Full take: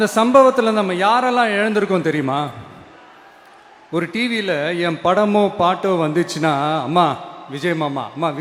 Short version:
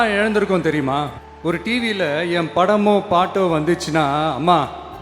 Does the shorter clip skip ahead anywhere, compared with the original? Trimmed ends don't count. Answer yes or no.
yes